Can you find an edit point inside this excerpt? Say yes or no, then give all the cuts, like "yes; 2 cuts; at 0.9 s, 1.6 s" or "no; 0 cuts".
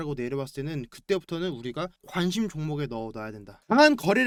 no; 0 cuts